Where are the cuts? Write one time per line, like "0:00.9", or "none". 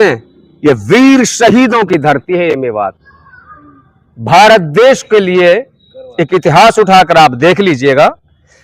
none